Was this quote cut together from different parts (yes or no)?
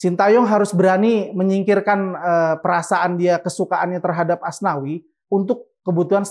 no